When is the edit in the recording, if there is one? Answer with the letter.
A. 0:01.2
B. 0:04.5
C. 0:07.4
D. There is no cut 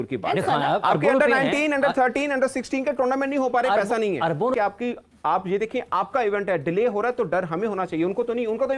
B